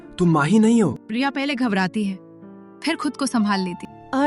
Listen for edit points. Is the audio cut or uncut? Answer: uncut